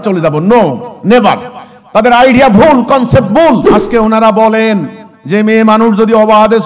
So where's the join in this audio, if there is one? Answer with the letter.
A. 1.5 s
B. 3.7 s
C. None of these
B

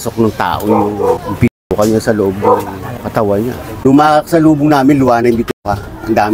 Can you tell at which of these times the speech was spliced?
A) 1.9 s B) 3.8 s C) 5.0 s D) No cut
B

